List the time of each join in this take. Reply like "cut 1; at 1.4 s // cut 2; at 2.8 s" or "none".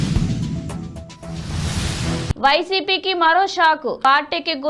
cut 1; at 1.9 s